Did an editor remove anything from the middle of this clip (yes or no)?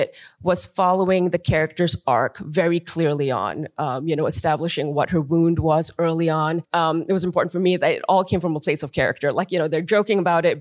yes